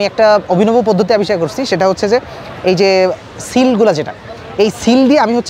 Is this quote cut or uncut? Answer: uncut